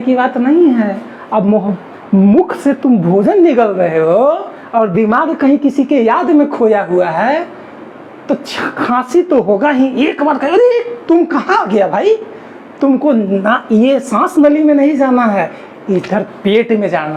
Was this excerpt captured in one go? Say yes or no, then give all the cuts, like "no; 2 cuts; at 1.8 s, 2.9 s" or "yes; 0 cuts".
yes; 0 cuts